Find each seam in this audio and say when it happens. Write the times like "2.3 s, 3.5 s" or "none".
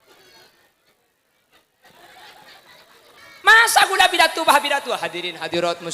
3.2 s